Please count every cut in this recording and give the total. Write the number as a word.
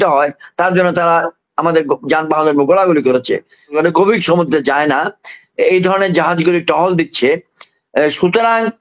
one